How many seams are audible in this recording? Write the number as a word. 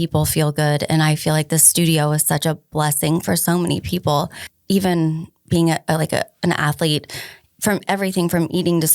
one